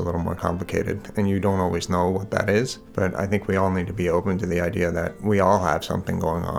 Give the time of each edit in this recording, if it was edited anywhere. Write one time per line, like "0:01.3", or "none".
0:02.8
0:05.1